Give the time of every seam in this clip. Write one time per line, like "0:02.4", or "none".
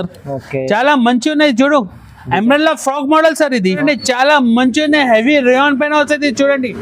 0:03.6